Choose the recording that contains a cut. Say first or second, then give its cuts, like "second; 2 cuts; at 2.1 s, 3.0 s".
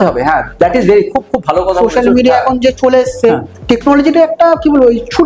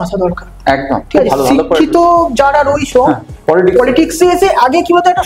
first; 1 cut; at 3.5 s